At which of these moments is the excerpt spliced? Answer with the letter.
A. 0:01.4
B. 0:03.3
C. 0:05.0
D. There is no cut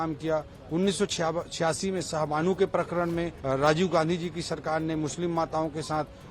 B